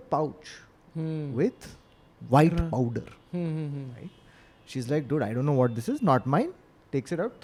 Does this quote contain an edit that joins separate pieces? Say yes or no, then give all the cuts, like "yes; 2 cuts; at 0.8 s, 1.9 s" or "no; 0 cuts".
no; 0 cuts